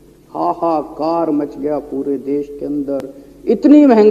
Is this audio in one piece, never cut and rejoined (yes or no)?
yes